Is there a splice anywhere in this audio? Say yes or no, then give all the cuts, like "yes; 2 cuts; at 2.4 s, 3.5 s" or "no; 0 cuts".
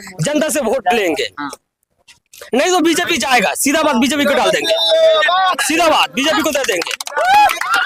no; 0 cuts